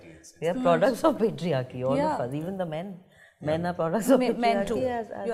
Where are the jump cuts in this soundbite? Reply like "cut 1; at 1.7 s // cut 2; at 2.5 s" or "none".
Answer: none